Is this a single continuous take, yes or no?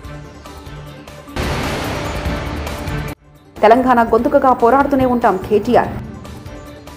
no